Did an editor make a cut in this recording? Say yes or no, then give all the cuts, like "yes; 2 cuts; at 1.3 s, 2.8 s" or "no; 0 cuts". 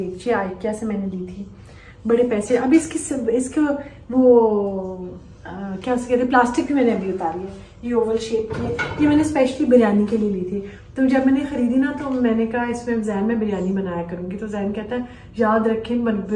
no; 0 cuts